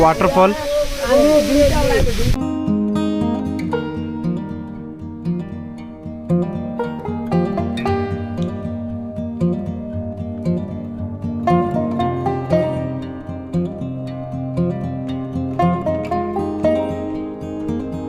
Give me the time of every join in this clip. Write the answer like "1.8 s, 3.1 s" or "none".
none